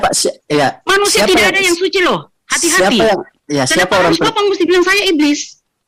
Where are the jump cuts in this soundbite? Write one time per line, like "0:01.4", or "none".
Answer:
none